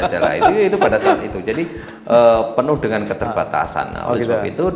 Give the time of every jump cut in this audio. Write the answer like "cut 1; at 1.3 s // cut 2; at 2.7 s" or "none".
none